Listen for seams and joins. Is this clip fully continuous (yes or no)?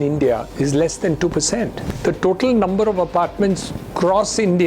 no